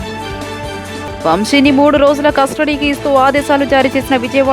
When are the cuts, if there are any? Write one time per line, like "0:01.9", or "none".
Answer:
0:01.2